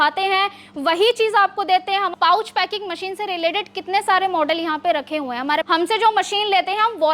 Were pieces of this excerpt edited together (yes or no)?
yes